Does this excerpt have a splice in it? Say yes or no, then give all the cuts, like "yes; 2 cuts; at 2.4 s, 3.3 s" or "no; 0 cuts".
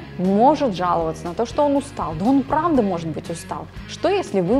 no; 0 cuts